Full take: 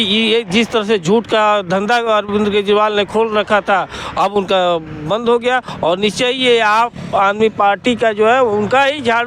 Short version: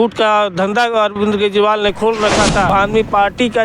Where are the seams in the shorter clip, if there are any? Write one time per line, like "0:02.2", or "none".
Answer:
0:02.7